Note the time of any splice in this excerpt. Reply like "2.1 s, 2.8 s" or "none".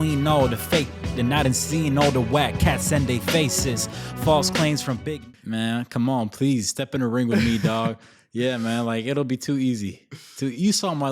5.1 s